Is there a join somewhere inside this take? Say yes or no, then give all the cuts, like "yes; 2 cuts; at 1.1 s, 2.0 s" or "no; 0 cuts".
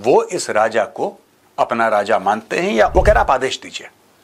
yes; 1 cut; at 2.9 s